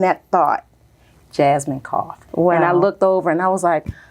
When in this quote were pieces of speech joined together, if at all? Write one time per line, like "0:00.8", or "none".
0:02.2